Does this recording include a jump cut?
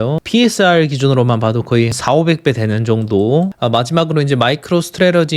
yes; 2 cuts; at 2.0 s, 3.5 s

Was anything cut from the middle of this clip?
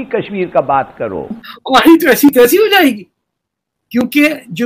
yes; 1 cut; at 1.4 s

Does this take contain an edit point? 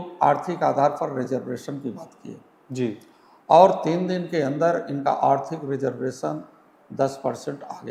no; 0 cuts

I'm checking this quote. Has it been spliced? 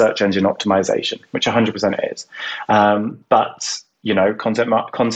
no; 0 cuts

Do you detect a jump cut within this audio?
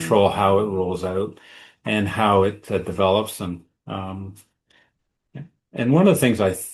no; 0 cuts

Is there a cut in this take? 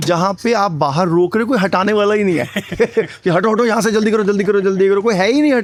no; 0 cuts

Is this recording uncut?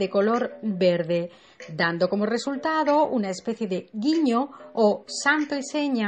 yes; 0 cuts

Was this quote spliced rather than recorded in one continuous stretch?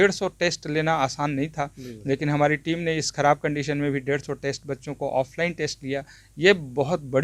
no; 0 cuts

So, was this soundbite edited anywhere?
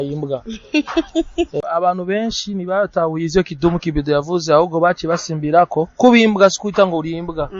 yes; 1 cut; at 1.5 s

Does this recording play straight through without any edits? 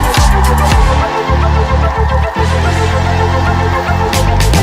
no; 1 cut; at 1.3 s

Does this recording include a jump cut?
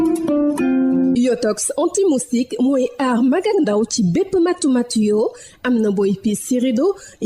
yes; 1 cut; at 1.1 s

